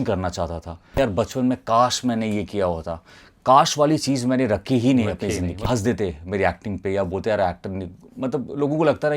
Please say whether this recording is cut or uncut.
cut